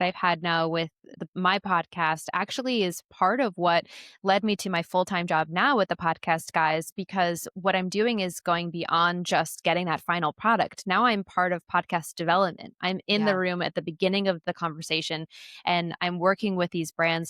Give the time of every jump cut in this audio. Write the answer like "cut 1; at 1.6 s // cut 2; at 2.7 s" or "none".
cut 1; at 1.2 s